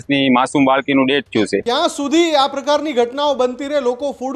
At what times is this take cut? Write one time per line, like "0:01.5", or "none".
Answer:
0:01.6